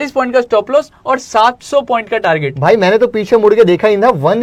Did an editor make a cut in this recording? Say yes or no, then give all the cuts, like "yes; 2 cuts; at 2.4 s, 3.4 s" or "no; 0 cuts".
no; 0 cuts